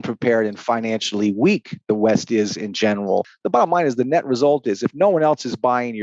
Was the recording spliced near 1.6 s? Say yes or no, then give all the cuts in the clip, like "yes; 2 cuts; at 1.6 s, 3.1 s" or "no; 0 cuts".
no; 1 cut; at 3.4 s